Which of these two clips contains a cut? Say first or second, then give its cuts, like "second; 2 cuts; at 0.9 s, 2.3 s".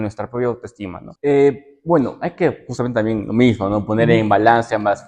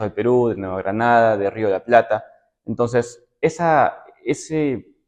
first; 1 cut; at 1.0 s